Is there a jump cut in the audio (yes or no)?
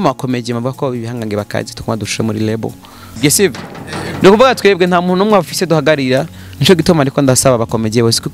yes